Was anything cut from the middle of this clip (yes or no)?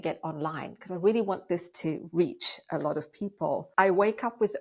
yes